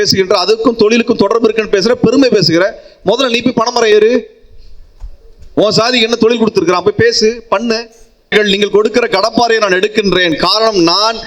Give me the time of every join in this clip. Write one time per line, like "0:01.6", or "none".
0:08.3

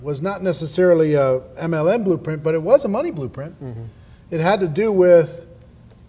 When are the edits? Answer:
0:04.9

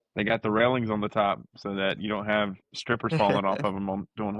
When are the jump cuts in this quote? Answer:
0:02.7

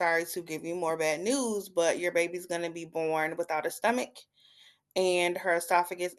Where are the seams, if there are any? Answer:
none

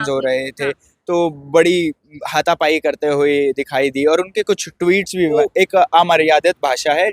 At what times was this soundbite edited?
0:05.4

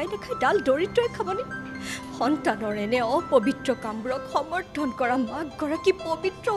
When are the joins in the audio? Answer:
none

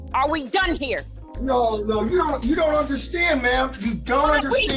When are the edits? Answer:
0:03.8

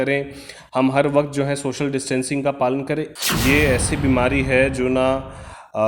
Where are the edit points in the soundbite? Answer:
0:03.1

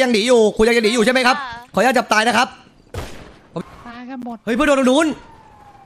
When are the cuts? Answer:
0:03.6

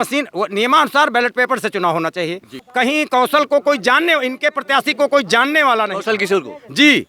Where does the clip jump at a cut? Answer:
0:02.6

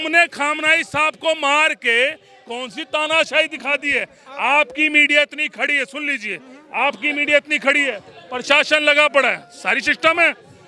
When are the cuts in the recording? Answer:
none

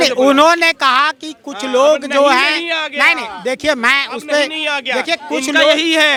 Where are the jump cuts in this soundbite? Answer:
none

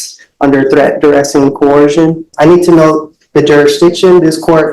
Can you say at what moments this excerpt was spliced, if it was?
0:02.3

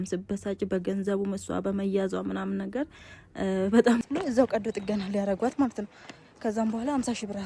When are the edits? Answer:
0:04.0

